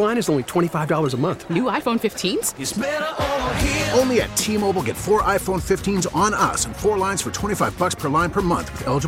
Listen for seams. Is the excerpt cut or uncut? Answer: uncut